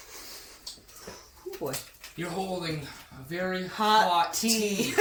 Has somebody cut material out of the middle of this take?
no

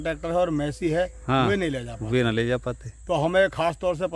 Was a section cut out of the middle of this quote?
no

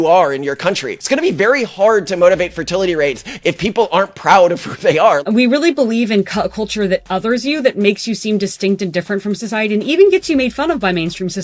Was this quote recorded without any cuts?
no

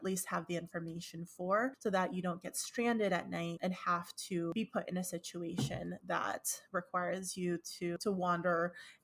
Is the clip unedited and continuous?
no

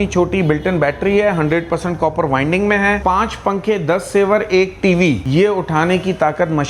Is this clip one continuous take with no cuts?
no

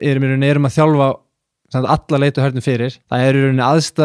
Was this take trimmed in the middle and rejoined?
yes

